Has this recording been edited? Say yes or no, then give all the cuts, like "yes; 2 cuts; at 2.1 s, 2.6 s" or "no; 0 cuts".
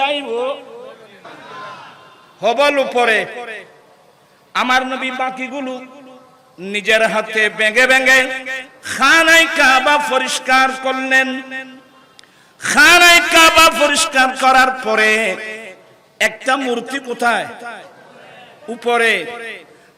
yes; 1 cut; at 1.4 s